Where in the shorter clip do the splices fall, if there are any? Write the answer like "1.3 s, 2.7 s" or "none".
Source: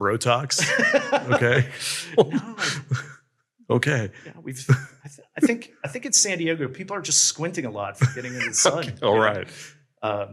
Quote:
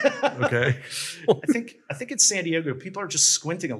1.4 s